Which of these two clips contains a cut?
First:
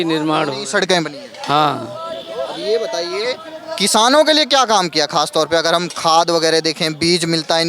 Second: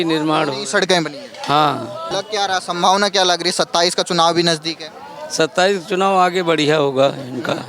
second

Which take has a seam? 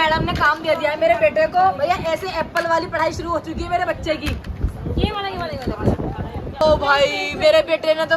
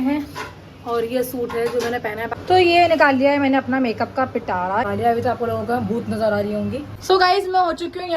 second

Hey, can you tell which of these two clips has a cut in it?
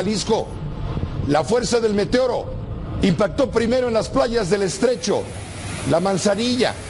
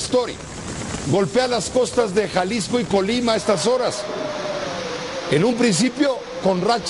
second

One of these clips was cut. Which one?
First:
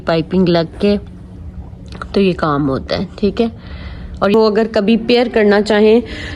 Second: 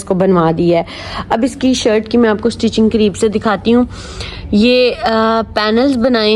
first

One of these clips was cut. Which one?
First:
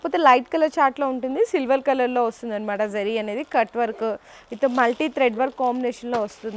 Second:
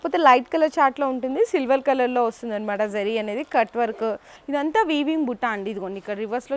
second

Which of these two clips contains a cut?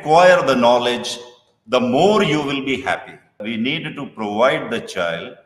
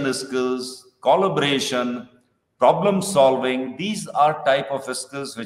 first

